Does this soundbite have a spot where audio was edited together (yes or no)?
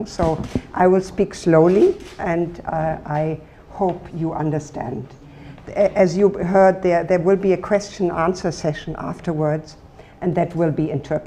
yes